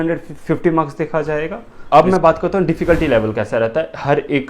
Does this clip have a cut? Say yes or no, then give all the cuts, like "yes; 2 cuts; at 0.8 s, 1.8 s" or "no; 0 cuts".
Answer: yes; 1 cut; at 1.7 s